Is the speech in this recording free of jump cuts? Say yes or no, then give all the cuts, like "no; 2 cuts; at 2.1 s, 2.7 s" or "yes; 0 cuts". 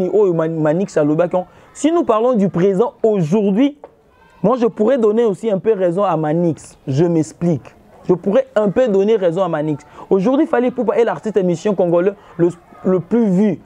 yes; 0 cuts